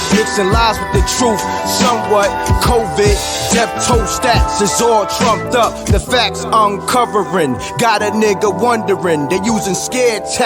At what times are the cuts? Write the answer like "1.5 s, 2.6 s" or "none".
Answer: none